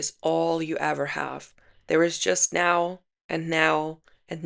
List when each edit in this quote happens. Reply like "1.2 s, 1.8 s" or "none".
none